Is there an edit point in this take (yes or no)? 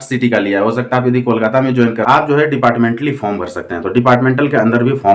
yes